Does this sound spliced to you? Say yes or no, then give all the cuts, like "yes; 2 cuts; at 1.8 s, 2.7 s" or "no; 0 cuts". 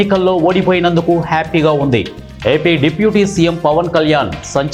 no; 0 cuts